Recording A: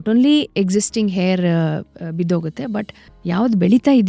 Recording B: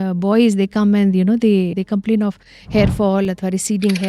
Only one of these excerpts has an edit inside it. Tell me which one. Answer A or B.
B